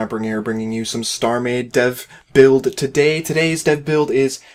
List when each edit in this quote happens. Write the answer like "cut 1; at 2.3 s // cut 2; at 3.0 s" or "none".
none